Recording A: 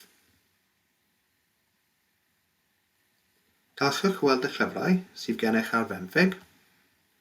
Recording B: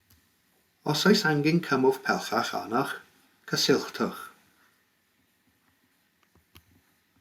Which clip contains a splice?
A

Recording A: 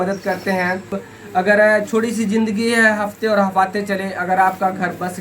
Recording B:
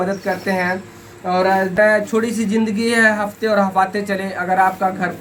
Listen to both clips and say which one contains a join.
A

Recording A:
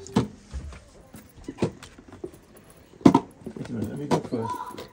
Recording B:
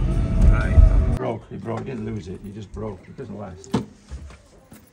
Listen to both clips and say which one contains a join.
B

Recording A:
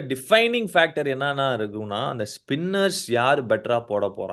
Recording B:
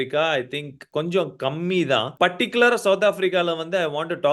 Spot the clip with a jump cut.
B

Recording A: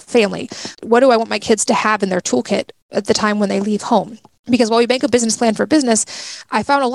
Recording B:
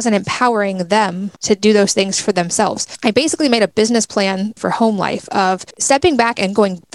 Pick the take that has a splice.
B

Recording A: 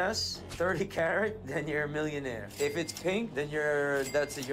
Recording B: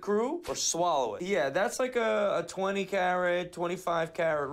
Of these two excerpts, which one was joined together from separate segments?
B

